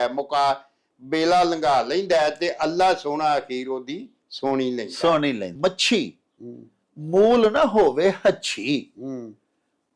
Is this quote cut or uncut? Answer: cut